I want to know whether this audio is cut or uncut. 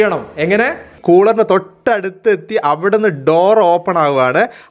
cut